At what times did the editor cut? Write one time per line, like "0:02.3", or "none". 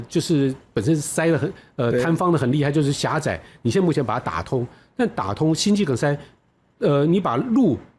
none